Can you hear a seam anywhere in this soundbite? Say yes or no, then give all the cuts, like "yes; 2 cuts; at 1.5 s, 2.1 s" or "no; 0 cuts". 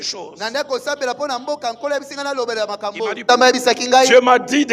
yes; 1 cut; at 3.2 s